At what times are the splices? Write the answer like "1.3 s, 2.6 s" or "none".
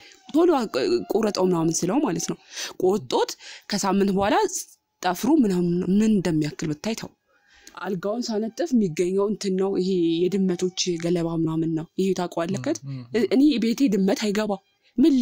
7.6 s